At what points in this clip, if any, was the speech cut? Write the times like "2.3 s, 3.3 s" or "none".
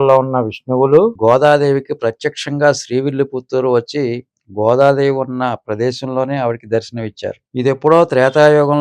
1.2 s